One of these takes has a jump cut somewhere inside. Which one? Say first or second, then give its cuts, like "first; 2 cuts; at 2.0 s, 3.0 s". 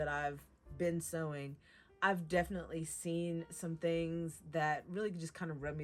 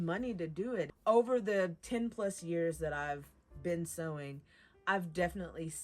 second; 2 cuts; at 0.9 s, 1.8 s